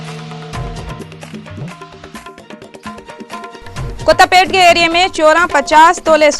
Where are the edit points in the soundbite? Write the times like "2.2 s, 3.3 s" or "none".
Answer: none